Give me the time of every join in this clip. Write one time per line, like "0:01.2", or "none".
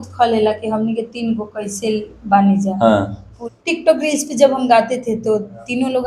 0:03.3